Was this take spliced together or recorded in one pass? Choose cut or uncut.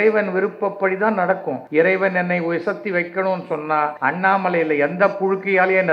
cut